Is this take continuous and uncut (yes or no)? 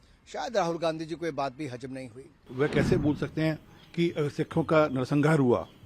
no